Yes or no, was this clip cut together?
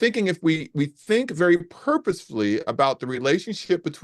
no